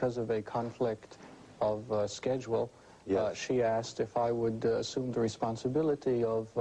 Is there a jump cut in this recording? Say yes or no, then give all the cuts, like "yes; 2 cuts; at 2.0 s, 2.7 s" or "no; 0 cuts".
yes; 1 cut; at 2.9 s